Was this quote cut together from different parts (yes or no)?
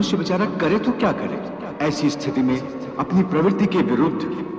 yes